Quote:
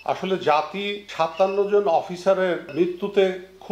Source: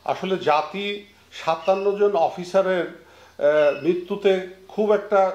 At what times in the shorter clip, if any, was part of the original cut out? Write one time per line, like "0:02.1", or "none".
0:01.0
0:02.7